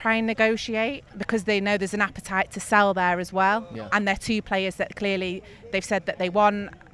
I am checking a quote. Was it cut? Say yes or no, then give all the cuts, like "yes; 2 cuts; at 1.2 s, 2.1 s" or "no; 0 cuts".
yes; 1 cut; at 1.1 s